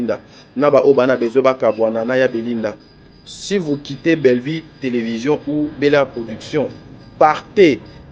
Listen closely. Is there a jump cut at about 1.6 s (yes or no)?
no